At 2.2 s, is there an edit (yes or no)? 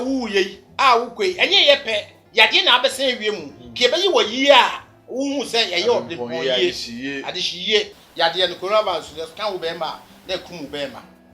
no